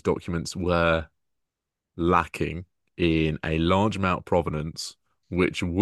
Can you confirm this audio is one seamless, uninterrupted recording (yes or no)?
yes